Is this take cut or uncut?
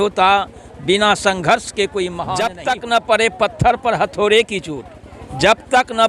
cut